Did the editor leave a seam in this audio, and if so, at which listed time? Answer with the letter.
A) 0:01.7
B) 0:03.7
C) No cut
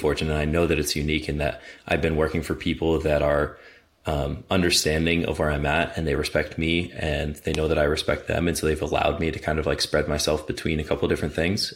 C